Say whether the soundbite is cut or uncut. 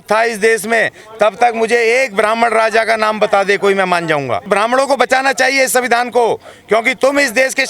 cut